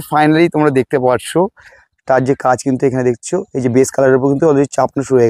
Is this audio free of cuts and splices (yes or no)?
no